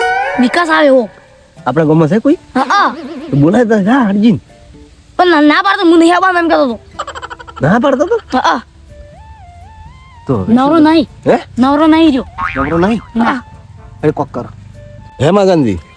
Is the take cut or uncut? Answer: cut